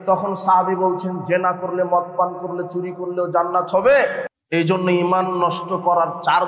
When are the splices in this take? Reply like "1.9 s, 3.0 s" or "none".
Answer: 4.3 s